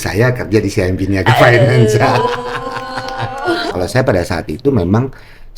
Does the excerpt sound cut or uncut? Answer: cut